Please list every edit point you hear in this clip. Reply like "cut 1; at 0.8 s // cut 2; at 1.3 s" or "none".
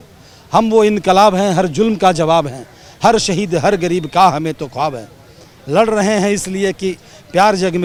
none

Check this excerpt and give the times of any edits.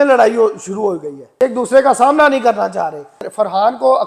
cut 1; at 1.2 s // cut 2; at 3.2 s

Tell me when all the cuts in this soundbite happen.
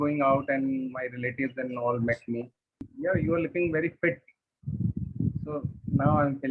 cut 1; at 2.9 s

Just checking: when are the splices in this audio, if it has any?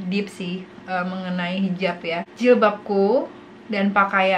cut 1; at 2.3 s

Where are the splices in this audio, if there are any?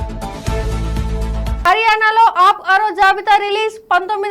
cut 1; at 1.6 s

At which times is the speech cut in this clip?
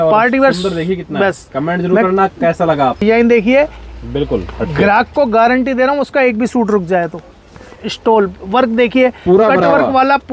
cut 1; at 3.0 s // cut 2; at 7.7 s

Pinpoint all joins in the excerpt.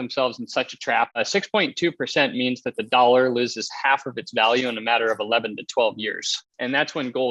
cut 1; at 1.2 s // cut 2; at 6.4 s

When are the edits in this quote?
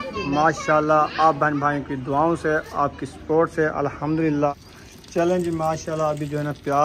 cut 1; at 4.5 s

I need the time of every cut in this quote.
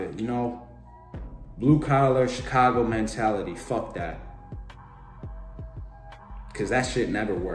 cut 1; at 4.2 s // cut 2; at 6.0 s

